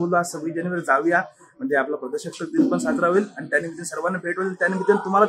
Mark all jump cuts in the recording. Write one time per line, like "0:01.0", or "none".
none